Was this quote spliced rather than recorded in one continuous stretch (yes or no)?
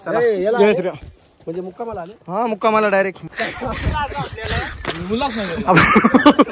yes